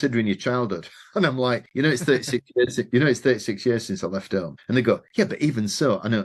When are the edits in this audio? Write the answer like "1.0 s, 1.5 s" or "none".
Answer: 1.7 s, 4.6 s